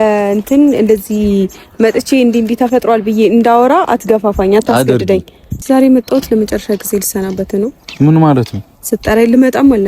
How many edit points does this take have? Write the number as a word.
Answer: one